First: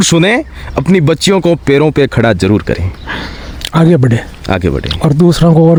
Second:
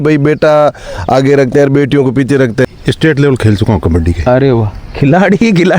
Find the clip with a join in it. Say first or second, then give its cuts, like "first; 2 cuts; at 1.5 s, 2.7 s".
second; 1 cut; at 2.7 s